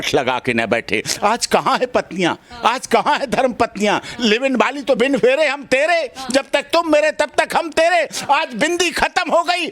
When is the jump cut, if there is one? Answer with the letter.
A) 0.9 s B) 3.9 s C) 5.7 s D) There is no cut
D